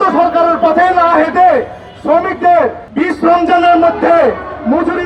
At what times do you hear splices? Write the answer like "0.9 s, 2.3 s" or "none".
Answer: 2.8 s